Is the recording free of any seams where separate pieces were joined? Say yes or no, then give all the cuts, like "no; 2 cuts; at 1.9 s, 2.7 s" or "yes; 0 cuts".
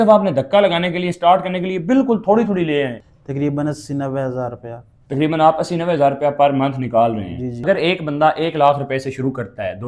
no; 2 cuts; at 3.1 s, 7.6 s